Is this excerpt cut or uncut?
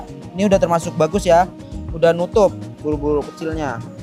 uncut